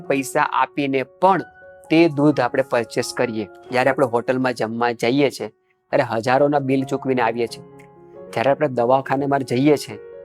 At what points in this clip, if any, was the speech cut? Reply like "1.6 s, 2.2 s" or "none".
3.5 s